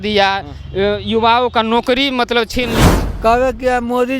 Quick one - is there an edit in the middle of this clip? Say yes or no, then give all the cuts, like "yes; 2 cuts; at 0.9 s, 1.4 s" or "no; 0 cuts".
yes; 1 cut; at 2.8 s